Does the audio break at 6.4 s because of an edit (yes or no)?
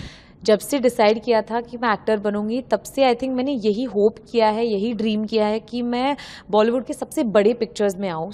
no